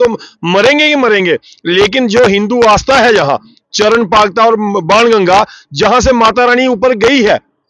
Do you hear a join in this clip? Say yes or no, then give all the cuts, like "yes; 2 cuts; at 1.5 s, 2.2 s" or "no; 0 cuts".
no; 0 cuts